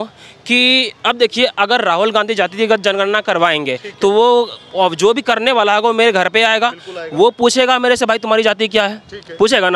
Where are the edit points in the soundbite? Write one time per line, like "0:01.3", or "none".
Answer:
none